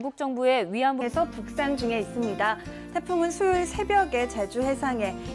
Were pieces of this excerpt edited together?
no; 0 cuts

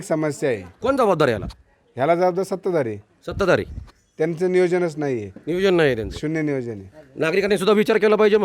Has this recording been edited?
no; 0 cuts

